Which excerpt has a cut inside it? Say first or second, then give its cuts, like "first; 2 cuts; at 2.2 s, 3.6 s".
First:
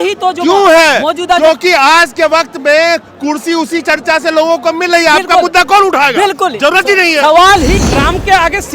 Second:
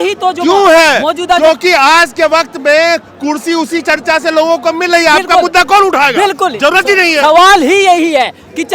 first; 1 cut; at 7.7 s